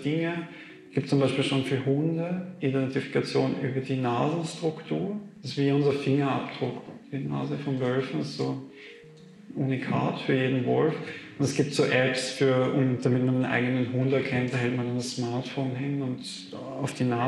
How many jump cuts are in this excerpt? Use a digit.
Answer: 0